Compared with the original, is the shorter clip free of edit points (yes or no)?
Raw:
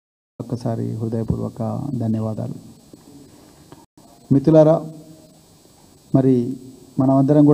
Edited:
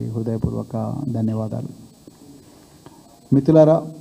no